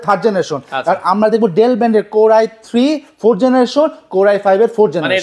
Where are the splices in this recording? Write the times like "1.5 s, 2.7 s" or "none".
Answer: none